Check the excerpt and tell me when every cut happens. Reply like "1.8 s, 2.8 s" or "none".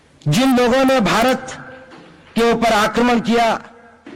none